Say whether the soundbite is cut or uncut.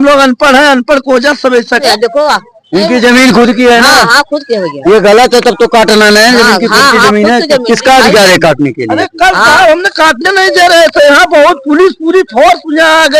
cut